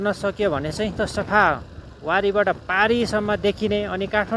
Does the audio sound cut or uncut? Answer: cut